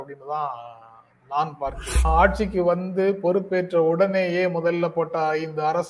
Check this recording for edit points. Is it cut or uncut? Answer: cut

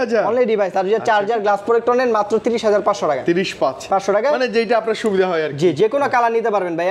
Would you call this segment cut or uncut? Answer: uncut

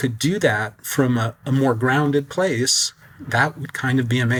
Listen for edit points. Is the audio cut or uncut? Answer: uncut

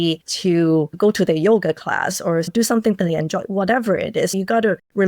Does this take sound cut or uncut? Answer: cut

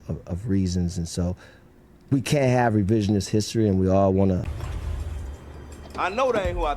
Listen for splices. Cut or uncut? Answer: cut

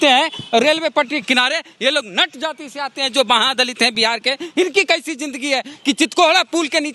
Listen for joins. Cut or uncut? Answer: uncut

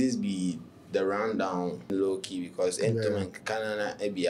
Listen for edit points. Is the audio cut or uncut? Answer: cut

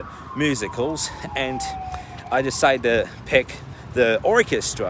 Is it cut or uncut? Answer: uncut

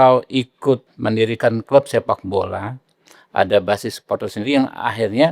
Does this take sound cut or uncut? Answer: cut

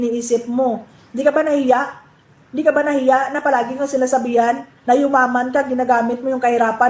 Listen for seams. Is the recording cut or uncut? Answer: cut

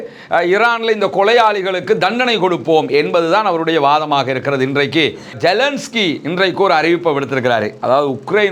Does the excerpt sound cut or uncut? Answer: cut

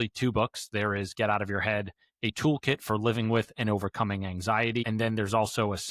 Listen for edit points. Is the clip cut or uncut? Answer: cut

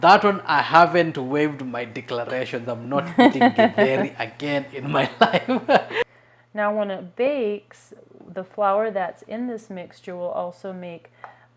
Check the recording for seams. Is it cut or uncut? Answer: cut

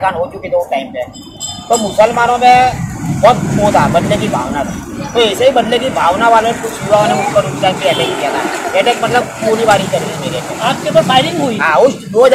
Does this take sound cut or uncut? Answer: uncut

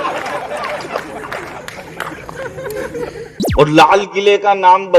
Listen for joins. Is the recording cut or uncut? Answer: cut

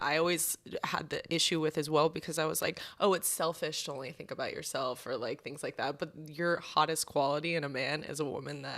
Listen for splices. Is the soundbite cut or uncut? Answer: uncut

